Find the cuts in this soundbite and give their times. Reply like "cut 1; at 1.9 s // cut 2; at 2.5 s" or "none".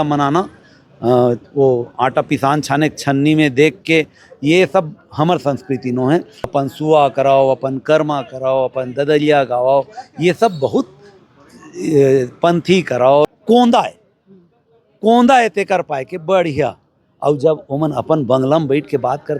cut 1; at 6.4 s // cut 2; at 13.3 s